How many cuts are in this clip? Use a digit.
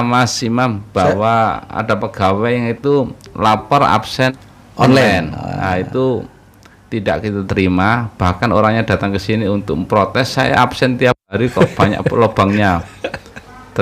0